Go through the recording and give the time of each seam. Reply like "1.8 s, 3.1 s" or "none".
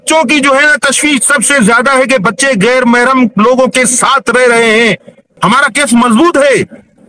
5.3 s